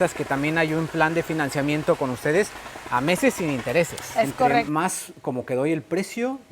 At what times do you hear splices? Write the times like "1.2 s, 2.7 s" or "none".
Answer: 4.7 s